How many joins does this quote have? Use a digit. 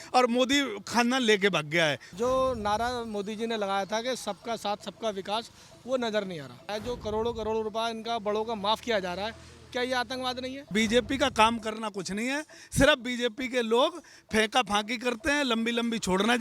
3